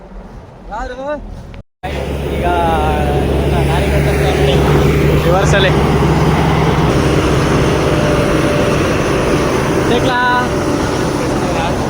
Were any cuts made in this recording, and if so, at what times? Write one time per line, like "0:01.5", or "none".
0:06.9